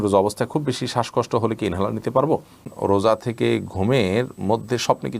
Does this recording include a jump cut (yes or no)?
yes